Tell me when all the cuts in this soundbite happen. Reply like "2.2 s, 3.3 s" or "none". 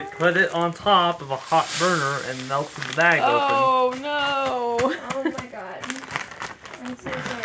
none

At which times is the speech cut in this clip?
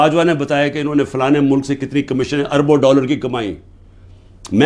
none

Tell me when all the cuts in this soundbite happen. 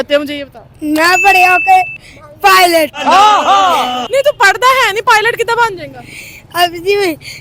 none

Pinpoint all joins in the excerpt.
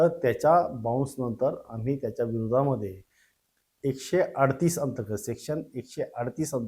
none

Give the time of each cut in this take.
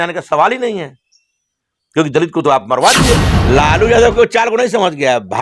3.3 s

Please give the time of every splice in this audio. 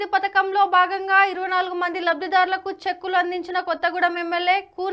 none

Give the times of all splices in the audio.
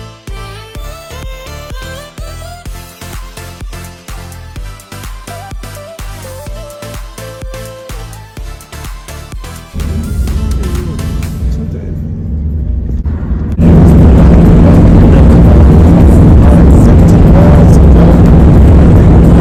none

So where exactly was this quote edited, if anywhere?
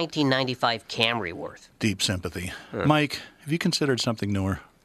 none

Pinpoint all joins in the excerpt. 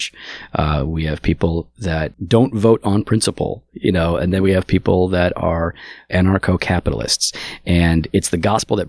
2.2 s, 5.9 s

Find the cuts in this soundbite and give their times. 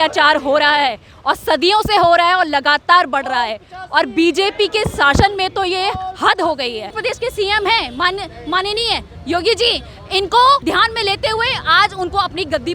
7.0 s, 10.6 s

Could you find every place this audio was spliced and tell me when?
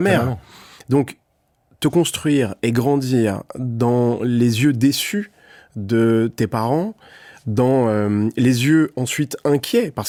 none

